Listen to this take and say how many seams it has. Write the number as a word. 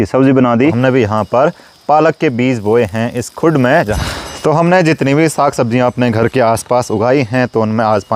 two